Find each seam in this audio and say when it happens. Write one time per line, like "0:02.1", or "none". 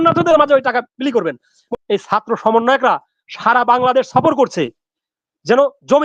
0:01.5